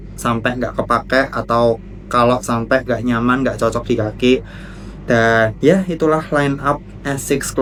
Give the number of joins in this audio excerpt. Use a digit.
0